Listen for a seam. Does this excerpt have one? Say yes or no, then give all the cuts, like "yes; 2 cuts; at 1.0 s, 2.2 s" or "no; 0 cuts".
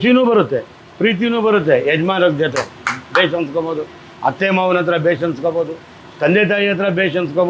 no; 0 cuts